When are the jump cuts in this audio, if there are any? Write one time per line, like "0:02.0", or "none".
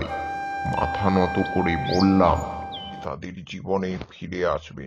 0:03.0